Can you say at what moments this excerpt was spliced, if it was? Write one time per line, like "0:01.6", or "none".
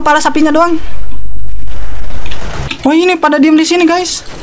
0:02.6